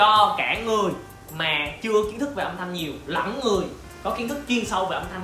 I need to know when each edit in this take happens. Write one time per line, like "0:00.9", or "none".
none